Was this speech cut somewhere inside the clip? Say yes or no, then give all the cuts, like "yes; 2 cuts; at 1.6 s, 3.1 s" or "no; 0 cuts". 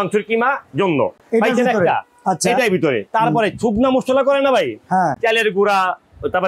no; 0 cuts